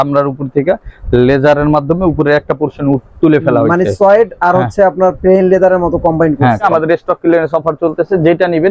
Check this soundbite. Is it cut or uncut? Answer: cut